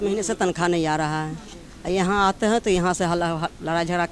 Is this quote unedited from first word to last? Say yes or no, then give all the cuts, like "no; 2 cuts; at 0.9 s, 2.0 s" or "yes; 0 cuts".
yes; 0 cuts